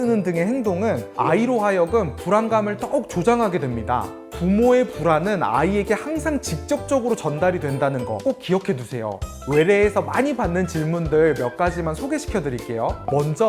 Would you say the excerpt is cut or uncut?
cut